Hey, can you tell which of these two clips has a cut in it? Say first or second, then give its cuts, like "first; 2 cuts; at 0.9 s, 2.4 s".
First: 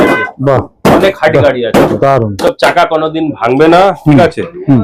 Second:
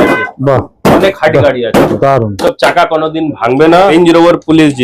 second; 1 cut; at 3.9 s